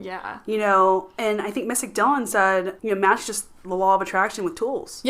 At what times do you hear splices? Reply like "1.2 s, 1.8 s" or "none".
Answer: 2.8 s